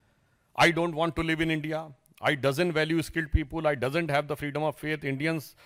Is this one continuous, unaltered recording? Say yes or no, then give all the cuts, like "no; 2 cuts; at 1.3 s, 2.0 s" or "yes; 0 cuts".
yes; 0 cuts